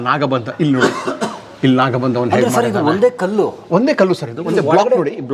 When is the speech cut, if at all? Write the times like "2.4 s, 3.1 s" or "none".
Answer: none